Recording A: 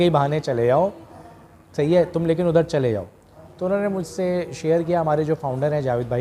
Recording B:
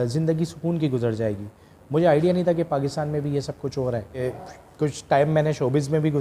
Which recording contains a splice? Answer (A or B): B